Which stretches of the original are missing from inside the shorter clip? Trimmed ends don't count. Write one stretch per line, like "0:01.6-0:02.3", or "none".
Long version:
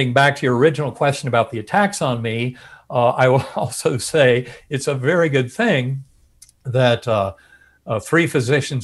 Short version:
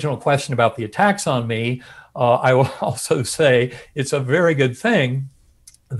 none